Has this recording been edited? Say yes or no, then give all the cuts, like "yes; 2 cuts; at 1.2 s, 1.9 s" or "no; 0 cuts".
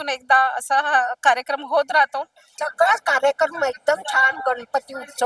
yes; 1 cut; at 2.5 s